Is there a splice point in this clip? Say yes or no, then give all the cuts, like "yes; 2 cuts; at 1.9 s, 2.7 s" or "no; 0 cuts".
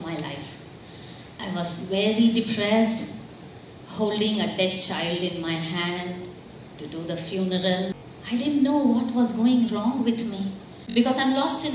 yes; 2 cuts; at 8.1 s, 10.7 s